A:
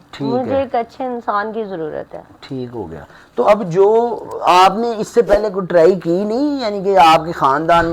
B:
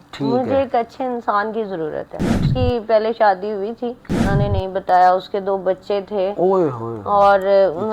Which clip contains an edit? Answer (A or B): B